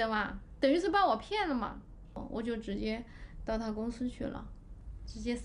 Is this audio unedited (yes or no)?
no